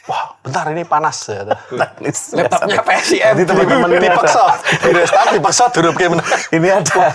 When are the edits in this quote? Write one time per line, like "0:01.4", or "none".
none